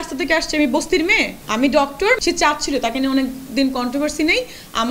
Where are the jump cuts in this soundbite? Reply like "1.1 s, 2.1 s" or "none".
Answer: 1.4 s, 2.2 s